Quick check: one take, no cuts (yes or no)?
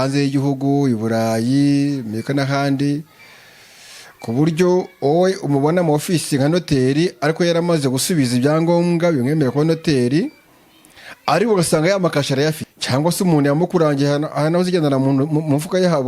no